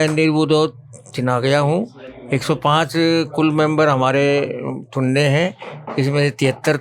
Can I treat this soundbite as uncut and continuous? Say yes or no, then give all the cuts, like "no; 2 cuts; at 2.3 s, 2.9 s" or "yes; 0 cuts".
yes; 0 cuts